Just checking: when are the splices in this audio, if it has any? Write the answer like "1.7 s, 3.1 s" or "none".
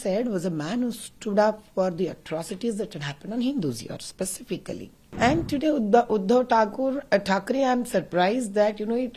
5.0 s